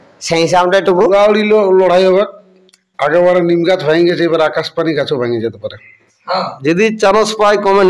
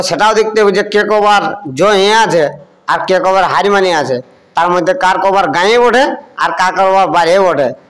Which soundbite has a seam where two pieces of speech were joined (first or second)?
first